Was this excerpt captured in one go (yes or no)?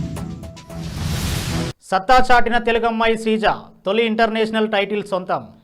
yes